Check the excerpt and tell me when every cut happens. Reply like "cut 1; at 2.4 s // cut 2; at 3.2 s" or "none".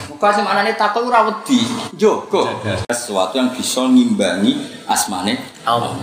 cut 1; at 3.1 s